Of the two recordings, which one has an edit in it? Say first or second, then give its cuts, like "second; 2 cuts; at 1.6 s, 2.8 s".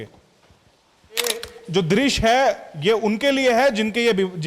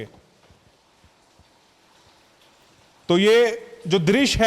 first; 1 cut; at 1.2 s